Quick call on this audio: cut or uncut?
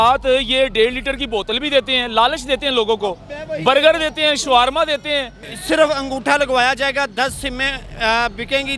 cut